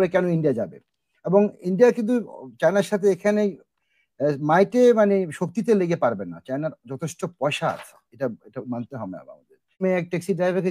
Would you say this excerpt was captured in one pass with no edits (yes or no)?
no